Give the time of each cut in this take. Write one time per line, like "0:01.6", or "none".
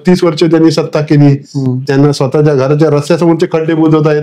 none